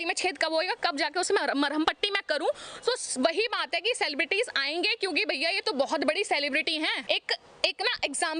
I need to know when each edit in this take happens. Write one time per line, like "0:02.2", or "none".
0:07.0